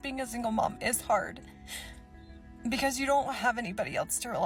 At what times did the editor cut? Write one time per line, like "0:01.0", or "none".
none